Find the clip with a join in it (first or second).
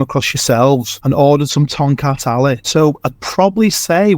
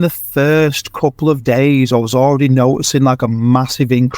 first